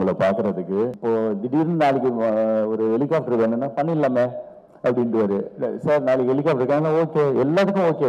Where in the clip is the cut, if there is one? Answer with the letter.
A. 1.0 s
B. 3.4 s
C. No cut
A